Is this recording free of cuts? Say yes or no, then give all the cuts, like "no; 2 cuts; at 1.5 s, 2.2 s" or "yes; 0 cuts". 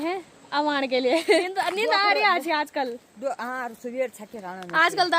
no; 1 cut; at 1.4 s